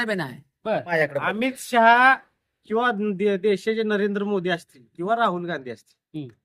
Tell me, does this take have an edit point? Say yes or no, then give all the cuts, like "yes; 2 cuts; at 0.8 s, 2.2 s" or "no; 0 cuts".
yes; 1 cut; at 0.9 s